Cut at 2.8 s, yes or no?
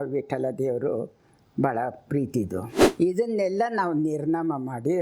yes